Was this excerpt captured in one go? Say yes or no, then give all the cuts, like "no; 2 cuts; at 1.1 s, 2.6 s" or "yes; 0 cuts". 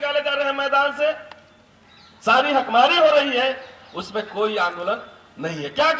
yes; 0 cuts